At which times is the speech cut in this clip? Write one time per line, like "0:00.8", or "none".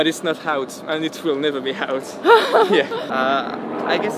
0:03.0